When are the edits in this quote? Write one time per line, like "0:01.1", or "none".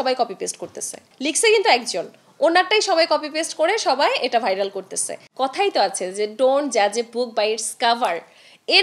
0:01.1
0:05.2